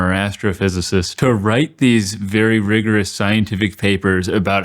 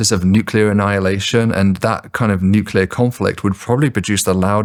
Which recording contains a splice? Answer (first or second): first